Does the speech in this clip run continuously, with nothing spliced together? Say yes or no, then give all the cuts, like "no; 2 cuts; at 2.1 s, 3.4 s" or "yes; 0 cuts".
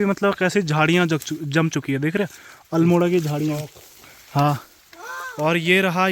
yes; 0 cuts